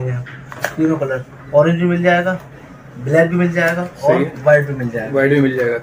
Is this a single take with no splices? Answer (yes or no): yes